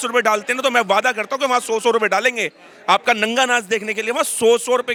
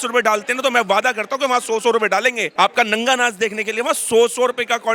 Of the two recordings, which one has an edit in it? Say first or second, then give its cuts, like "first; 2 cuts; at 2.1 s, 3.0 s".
second; 1 cut; at 2.4 s